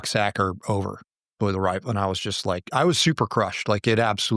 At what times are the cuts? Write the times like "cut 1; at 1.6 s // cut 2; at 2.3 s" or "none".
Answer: none